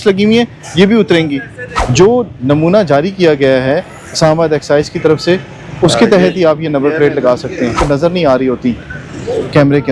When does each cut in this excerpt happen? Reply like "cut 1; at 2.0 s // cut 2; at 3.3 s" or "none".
cut 1; at 1.7 s // cut 2; at 7.8 s